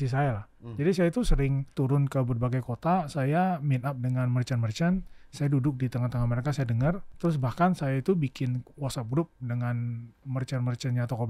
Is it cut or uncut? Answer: cut